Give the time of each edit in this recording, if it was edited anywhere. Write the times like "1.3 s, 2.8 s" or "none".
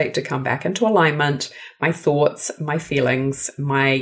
none